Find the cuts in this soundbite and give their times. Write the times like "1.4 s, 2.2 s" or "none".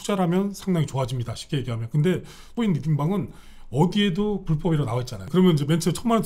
2.5 s, 5.2 s

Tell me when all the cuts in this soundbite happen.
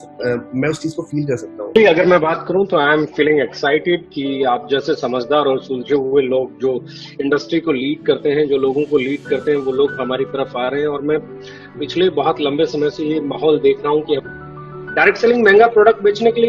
1.7 s, 14.3 s

